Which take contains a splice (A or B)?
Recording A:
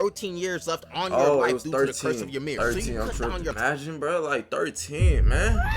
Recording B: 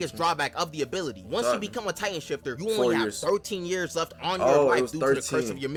A